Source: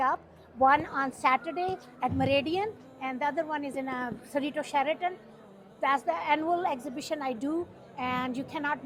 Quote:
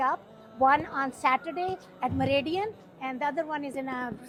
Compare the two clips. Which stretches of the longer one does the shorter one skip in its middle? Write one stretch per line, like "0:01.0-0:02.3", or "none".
none